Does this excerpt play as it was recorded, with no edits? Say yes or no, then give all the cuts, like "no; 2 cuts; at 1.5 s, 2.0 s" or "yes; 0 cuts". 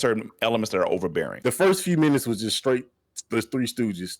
no; 1 cut; at 1.3 s